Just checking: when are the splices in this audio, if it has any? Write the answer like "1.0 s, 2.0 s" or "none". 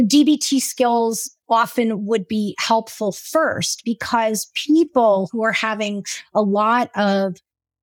1.3 s